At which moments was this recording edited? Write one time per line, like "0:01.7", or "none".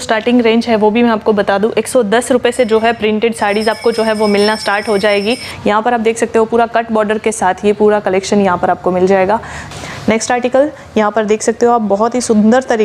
0:05.5
0:09.7